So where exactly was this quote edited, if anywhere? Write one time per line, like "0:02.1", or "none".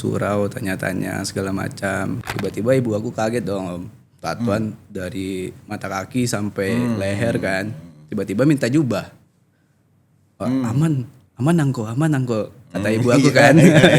0:02.2